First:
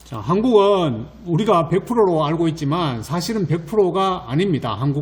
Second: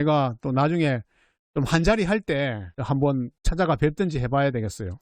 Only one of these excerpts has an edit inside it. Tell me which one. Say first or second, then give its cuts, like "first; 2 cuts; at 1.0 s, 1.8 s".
second; 2 cuts; at 2.7 s, 3.4 s